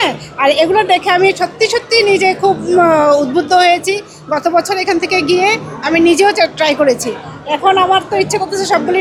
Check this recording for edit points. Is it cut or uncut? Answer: uncut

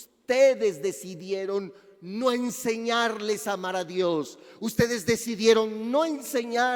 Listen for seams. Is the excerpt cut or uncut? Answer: uncut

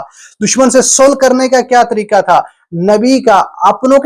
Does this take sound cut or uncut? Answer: uncut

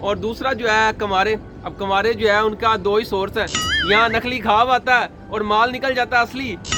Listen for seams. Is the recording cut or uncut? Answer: uncut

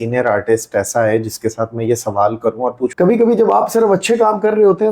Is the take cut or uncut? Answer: cut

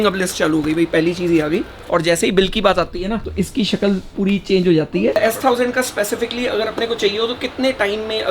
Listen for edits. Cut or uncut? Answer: cut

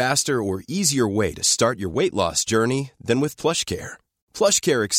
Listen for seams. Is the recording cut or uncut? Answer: uncut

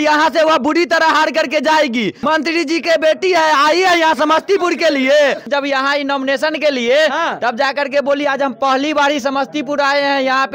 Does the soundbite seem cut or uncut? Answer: cut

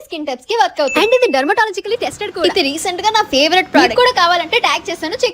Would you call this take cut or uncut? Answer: cut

